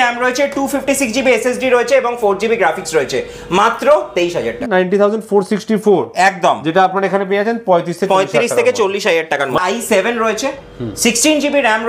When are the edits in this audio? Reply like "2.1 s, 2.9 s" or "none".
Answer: 4.6 s, 9.6 s